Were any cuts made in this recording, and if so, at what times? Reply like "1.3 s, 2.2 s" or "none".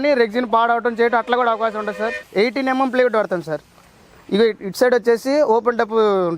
2.1 s